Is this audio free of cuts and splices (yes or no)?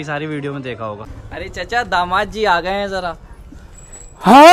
no